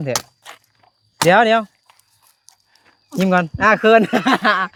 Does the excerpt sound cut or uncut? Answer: uncut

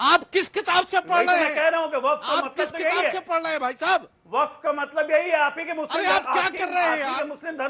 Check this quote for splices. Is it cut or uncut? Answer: uncut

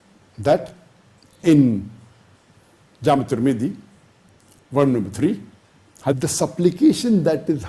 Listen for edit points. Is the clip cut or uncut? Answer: cut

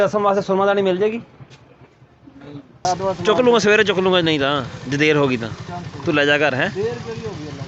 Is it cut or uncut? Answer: cut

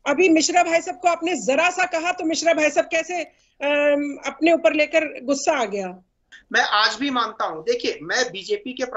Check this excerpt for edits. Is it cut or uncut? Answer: cut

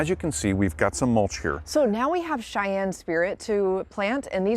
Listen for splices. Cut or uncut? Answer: cut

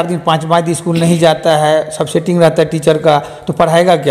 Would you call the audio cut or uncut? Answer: uncut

